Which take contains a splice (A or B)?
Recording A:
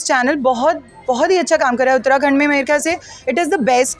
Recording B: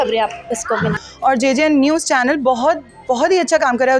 B